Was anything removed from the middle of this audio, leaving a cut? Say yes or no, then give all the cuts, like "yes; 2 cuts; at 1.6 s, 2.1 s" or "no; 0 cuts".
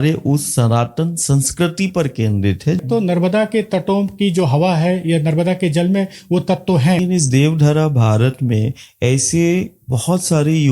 yes; 2 cuts; at 2.8 s, 7.0 s